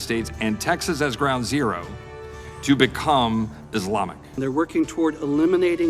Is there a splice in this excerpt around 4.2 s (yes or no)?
yes